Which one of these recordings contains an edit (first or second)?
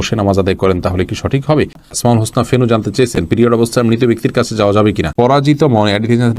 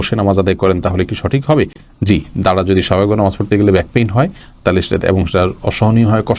first